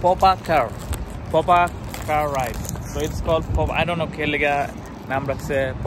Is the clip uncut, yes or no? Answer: yes